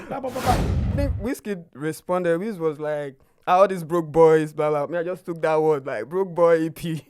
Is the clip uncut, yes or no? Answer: no